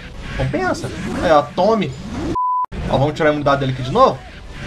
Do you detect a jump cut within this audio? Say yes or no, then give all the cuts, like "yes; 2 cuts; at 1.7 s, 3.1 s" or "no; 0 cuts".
yes; 1 cut; at 2.4 s